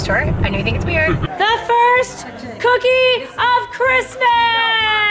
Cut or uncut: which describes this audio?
cut